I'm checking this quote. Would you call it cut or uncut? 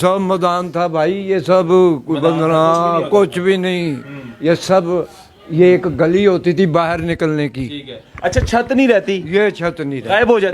uncut